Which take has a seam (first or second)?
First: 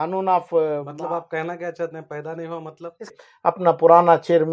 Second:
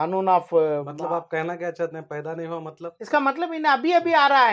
first